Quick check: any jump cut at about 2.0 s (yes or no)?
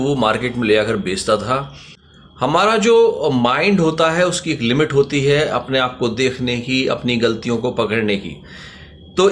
yes